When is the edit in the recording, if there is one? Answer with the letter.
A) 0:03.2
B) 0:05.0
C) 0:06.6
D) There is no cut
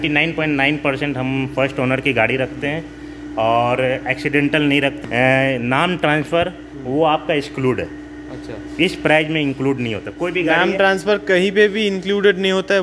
B